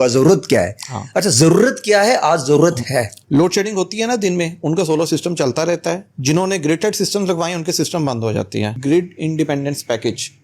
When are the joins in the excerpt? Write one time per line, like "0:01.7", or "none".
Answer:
0:03.2
0:08.8